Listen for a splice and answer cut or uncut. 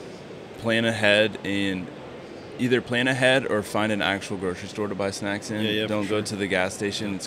uncut